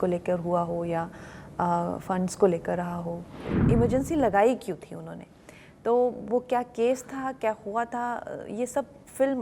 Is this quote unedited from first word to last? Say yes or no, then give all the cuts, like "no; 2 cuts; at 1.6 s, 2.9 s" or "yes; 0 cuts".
no; 1 cut; at 3.5 s